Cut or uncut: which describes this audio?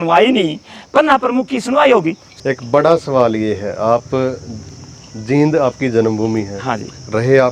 cut